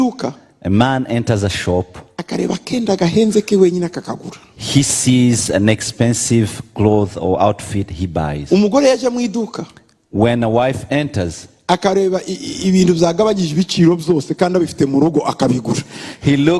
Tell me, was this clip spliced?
no; 0 cuts

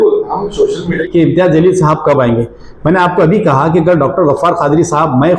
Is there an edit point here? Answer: yes; 1 cut; at 1.0 s

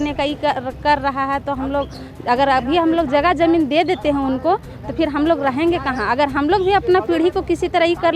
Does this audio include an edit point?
no; 0 cuts

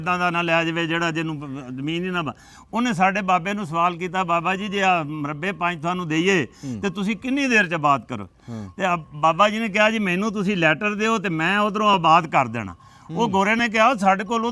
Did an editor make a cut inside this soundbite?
no; 0 cuts

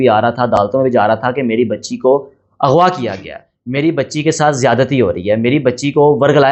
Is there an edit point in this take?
no; 0 cuts

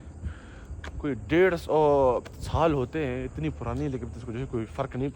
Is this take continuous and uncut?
yes; 0 cuts

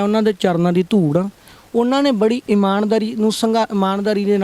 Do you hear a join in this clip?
no; 0 cuts

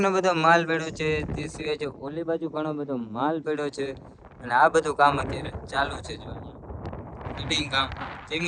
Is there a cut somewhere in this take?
no; 0 cuts

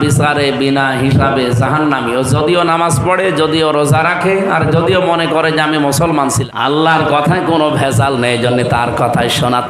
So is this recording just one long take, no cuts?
no; 1 cut; at 6.4 s

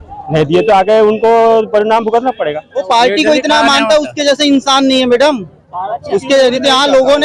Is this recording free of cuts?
no; 1 cut; at 2.8 s

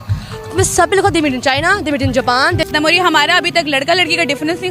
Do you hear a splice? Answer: yes; 1 cut; at 2.7 s

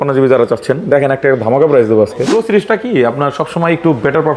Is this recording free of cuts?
no; 1 cut; at 2.3 s

